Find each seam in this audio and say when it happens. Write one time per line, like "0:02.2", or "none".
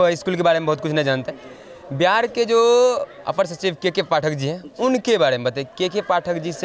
none

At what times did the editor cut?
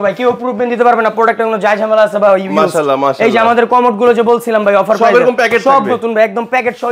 none

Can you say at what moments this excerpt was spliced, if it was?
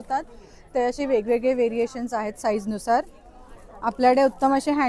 none

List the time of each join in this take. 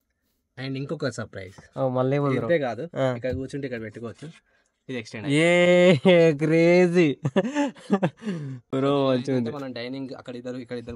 none

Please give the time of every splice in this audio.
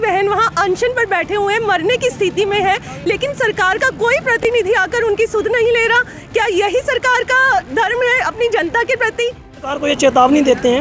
0:04.4
0:09.8

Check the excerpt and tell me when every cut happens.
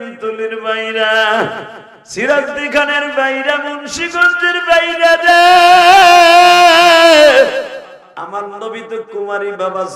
0:08.1

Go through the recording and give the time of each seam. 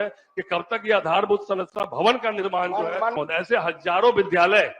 0:03.1

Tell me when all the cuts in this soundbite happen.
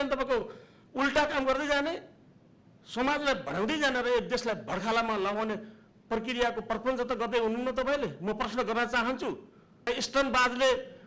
0:09.9

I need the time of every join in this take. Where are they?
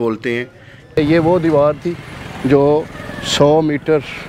0:01.0

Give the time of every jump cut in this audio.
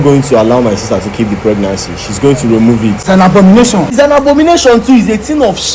0:03.0
0:03.9

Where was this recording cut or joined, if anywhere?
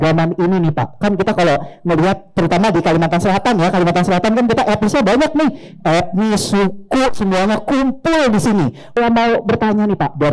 0:09.0

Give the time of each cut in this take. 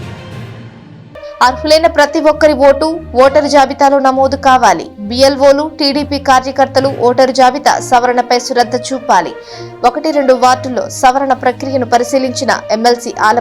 0:01.0

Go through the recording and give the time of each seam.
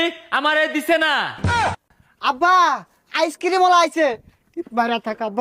0:01.6

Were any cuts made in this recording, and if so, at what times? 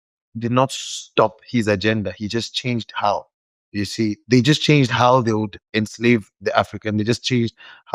none

